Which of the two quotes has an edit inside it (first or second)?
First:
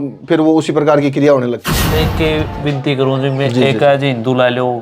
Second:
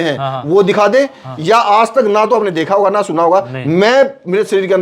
first